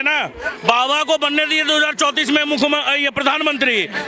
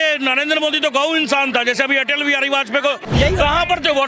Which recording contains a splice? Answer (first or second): second